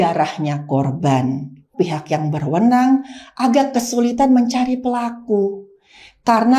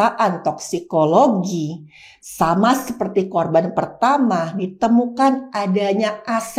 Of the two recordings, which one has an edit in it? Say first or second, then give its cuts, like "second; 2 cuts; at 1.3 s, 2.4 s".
first; 1 cut; at 1.7 s